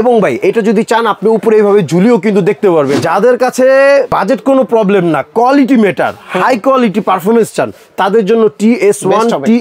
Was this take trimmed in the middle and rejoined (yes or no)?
yes